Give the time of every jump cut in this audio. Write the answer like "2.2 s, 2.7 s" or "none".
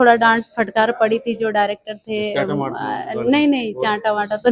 none